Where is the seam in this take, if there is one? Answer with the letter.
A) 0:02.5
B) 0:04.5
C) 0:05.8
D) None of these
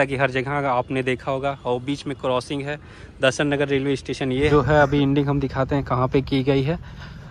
B